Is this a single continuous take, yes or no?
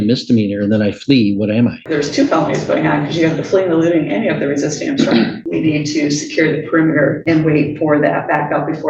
no